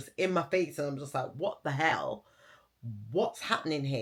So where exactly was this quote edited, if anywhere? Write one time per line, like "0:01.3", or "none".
none